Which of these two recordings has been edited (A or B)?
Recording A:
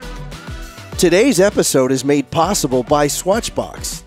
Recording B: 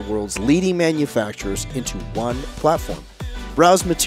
A